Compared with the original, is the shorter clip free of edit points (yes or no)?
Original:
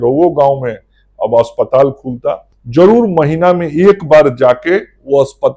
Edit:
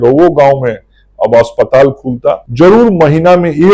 no